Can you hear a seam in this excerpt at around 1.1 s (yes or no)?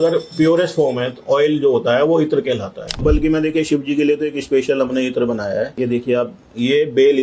no